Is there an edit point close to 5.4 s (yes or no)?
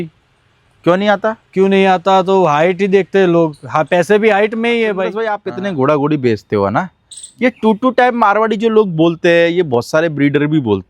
yes